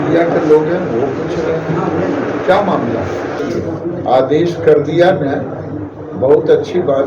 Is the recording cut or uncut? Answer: cut